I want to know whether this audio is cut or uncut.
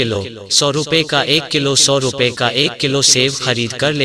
uncut